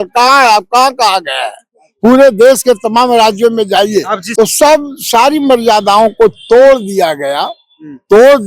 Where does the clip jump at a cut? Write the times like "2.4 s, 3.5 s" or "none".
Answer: 4.2 s